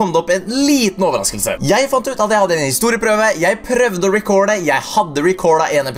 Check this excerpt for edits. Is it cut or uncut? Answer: uncut